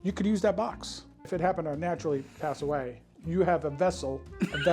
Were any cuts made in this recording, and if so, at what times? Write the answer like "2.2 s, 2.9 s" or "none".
1.3 s